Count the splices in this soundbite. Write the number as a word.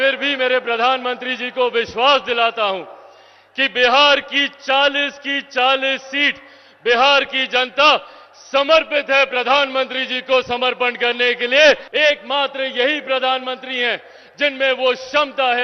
one